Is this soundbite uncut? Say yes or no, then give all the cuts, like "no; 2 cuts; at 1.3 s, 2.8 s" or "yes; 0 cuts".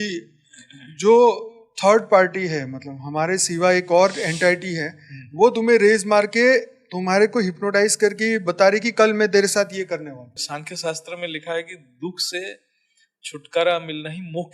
no; 1 cut; at 10.4 s